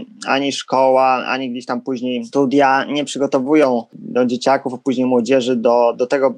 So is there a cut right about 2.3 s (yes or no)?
yes